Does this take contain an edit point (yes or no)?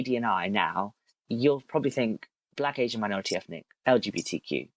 yes